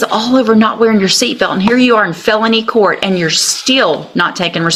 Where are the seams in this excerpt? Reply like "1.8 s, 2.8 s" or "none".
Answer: none